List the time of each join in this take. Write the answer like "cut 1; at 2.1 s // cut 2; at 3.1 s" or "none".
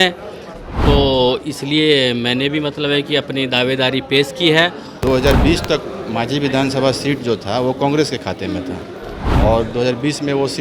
cut 1; at 5.0 s